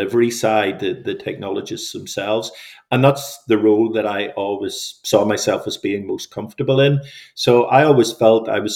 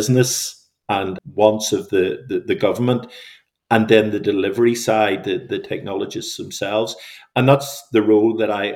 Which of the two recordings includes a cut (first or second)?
second